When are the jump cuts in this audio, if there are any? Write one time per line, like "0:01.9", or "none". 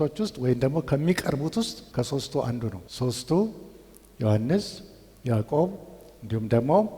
0:01.8
0:02.8

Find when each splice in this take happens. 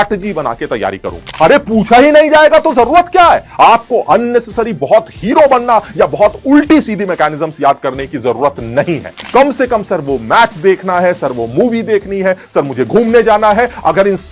0:01.3
0:09.2

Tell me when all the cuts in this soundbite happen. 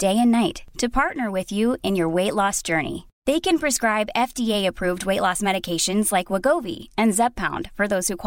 none

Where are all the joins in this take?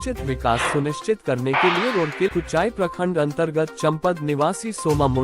0:02.3

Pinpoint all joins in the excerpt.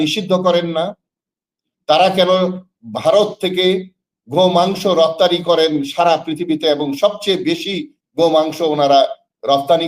none

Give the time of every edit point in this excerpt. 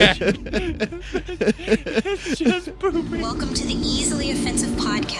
0:03.1

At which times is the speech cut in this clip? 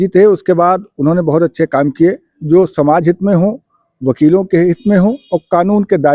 0:02.3

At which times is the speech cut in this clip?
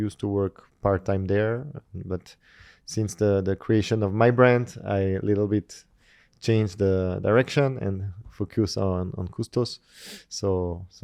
none

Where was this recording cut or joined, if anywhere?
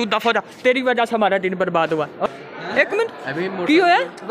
0:02.3

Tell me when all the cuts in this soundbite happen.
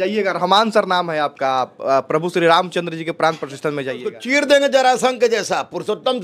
0:04.2

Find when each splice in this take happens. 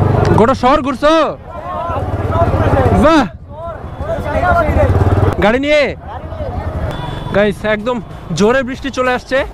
0:05.3
0:06.9

